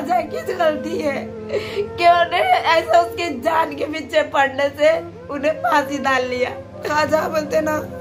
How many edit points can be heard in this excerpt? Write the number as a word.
one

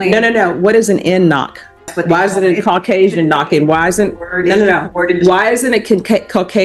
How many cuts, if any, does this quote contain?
one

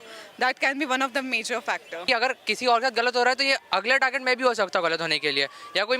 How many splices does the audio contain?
one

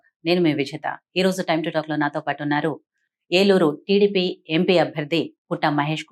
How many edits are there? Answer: zero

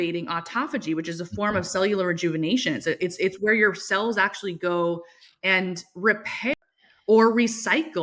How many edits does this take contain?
one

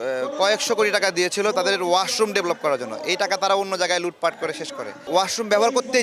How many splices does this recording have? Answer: one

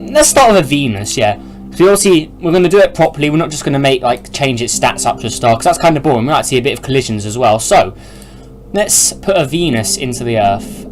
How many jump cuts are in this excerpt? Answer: one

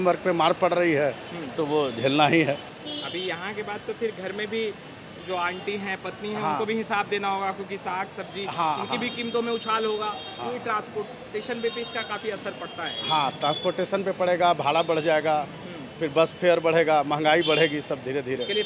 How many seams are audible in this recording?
zero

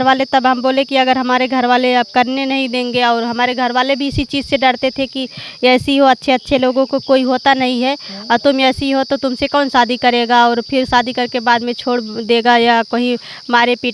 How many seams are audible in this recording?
zero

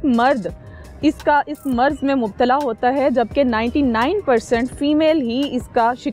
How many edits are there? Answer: zero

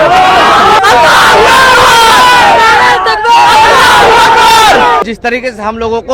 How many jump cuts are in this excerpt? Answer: two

